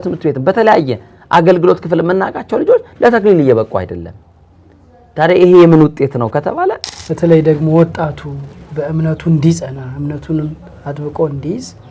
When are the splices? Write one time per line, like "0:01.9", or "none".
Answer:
0:06.9